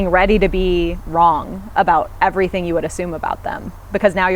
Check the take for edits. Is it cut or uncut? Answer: uncut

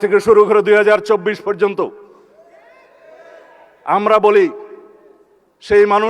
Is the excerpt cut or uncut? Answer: uncut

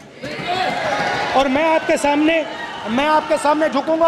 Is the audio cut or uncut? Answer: uncut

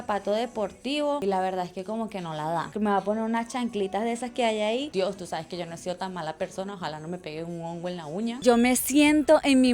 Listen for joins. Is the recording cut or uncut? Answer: cut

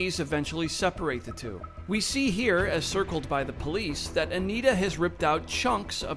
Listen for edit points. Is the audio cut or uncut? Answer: cut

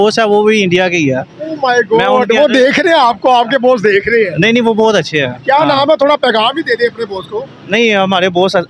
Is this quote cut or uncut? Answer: uncut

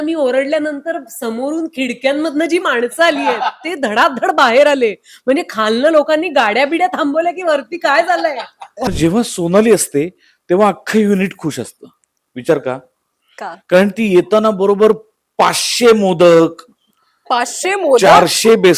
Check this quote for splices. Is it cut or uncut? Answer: cut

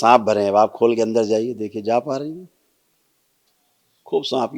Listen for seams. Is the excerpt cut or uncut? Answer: uncut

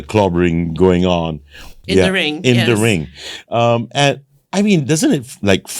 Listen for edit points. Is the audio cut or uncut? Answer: cut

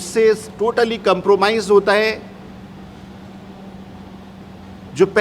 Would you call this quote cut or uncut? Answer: uncut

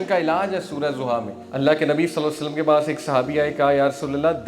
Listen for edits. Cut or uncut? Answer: cut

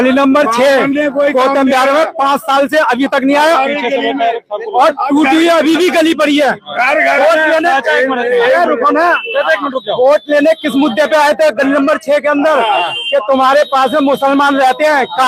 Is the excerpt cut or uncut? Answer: uncut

